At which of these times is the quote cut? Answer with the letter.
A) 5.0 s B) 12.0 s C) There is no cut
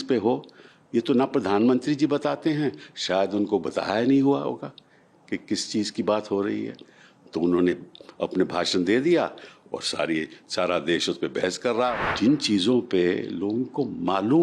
B